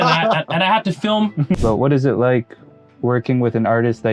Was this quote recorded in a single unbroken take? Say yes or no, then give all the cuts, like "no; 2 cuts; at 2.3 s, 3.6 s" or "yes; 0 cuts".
no; 1 cut; at 1.6 s